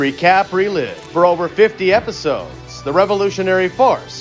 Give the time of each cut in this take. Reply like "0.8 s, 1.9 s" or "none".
none